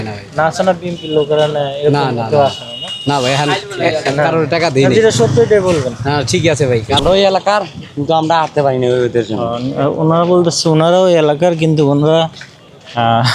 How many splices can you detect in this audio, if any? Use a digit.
1